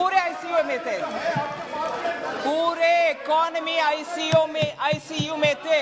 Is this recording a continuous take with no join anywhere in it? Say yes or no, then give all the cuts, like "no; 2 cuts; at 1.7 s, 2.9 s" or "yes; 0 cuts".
yes; 0 cuts